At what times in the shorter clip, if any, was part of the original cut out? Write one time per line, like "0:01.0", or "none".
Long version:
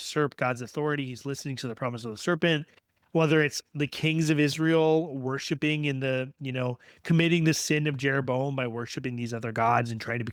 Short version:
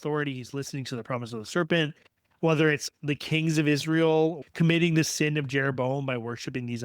0:04.4